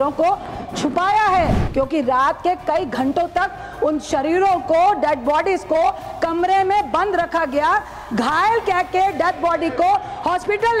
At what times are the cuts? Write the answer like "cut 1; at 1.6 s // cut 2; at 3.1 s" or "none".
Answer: cut 1; at 1.6 s